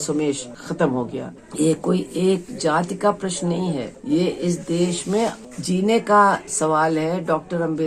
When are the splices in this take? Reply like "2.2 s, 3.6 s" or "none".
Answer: 1.4 s, 3.9 s, 5.5 s